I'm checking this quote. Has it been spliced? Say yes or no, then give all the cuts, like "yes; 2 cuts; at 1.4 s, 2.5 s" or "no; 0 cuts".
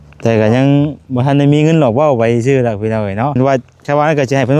yes; 1 cut; at 3.3 s